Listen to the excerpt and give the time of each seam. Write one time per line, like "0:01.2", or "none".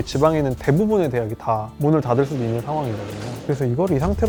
none